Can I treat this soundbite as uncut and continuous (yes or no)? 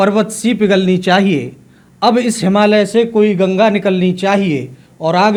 yes